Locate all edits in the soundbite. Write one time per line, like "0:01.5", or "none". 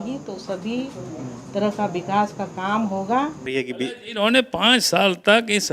0:03.4